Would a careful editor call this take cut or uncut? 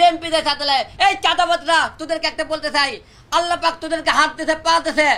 uncut